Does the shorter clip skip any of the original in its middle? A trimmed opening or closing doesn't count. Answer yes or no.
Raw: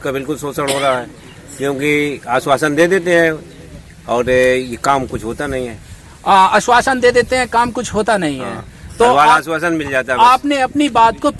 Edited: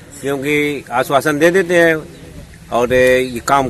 no